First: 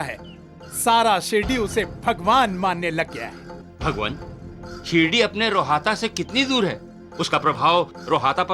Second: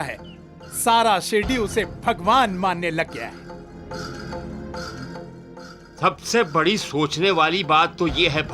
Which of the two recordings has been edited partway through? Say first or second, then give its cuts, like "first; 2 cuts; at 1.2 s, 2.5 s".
first; 1 cut; at 3.6 s